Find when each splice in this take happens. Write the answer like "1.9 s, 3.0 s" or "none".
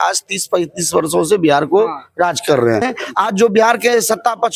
2.9 s